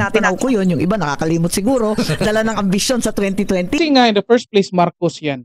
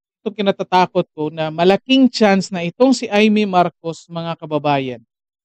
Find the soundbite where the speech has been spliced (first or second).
first